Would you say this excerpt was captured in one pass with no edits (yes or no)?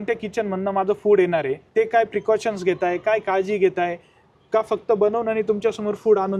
yes